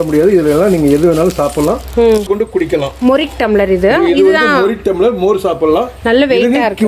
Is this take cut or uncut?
cut